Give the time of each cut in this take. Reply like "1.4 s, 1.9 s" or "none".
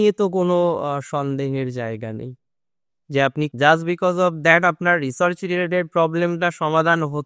3.5 s